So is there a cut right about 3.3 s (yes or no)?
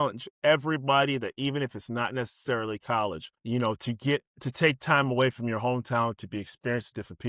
yes